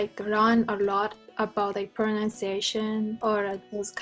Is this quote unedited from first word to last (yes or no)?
yes